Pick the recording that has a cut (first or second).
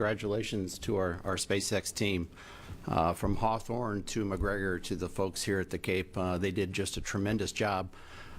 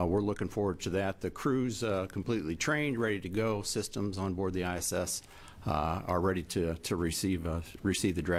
first